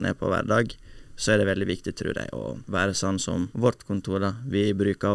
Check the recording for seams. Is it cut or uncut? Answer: cut